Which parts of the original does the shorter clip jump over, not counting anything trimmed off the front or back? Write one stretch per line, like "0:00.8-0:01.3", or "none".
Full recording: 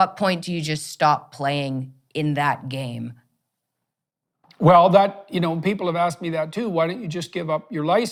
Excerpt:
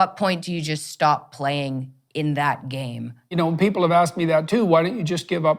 0:03.4-0:05.4